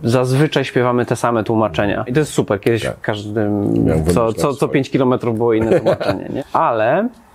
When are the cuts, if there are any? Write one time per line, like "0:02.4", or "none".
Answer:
0:02.1
0:06.3